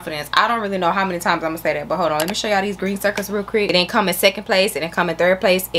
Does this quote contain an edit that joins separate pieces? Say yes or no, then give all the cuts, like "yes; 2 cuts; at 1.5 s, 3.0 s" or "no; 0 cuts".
yes; 1 cut; at 3.7 s